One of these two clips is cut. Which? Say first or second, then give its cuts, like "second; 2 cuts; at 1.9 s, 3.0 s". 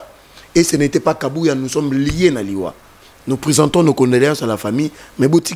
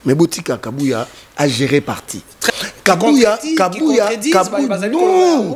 second; 1 cut; at 2.5 s